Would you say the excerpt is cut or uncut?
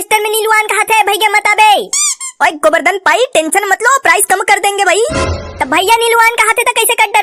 uncut